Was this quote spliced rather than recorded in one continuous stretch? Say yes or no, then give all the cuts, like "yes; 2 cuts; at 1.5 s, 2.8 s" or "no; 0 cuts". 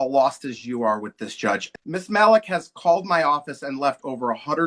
yes; 1 cut; at 1.7 s